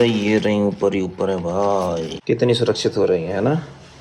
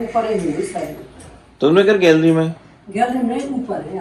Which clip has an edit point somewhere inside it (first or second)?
first